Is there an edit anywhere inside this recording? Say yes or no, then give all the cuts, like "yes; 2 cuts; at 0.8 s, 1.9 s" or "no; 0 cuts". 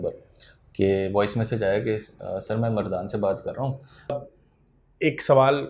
yes; 1 cut; at 4.2 s